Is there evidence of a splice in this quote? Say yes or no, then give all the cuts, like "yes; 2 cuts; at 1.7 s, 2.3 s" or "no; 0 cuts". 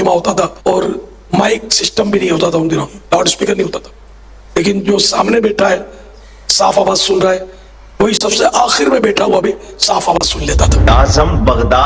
yes; 1 cut; at 10.9 s